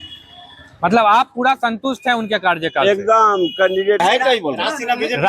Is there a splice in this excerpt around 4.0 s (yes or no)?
yes